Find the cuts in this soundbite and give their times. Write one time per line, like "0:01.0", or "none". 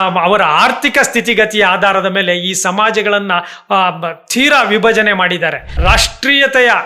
0:05.8